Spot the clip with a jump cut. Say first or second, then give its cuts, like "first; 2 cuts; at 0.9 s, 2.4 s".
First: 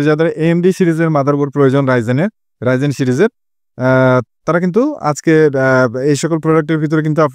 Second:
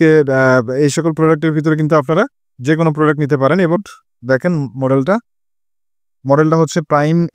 second; 1 cut; at 3.8 s